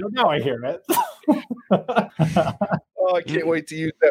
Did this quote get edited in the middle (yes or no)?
yes